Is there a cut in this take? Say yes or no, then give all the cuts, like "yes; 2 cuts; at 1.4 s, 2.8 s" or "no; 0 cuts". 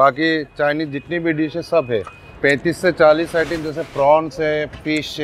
yes; 1 cut; at 2.2 s